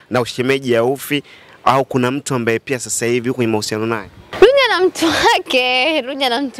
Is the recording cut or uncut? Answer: cut